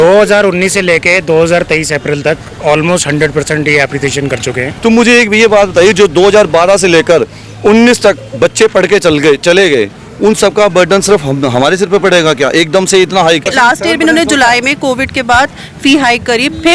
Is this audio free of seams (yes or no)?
no